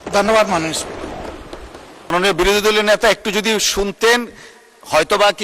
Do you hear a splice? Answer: yes; 1 cut; at 2.1 s

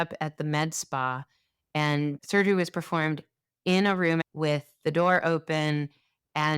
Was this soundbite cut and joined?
yes; 2 cuts; at 2.2 s, 4.3 s

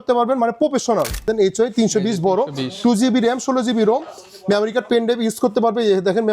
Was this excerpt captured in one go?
no; 1 cut; at 1.3 s

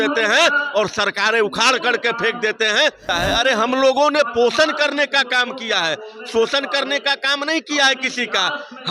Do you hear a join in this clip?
yes; 1 cut; at 3.1 s

